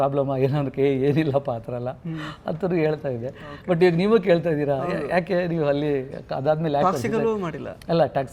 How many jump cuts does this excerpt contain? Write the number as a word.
zero